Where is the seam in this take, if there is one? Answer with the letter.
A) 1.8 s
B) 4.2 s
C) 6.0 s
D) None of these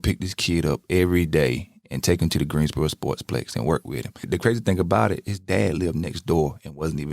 B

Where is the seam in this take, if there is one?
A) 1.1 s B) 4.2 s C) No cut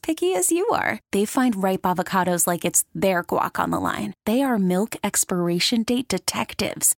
C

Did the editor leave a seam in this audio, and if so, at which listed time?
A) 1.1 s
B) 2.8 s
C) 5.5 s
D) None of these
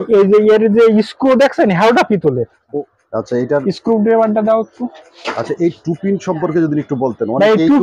B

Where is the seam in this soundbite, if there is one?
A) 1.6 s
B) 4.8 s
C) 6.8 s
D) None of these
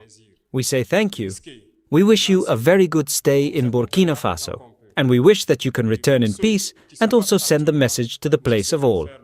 D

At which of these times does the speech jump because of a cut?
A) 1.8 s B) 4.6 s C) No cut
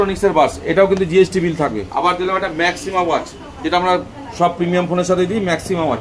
A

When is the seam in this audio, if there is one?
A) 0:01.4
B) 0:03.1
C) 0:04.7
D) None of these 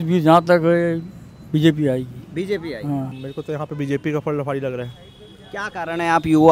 B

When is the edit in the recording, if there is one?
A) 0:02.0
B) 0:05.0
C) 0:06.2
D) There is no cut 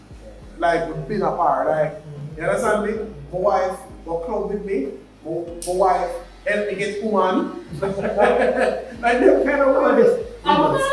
D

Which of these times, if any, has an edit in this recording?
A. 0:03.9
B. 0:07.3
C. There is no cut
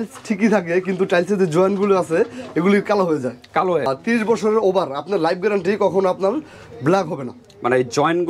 A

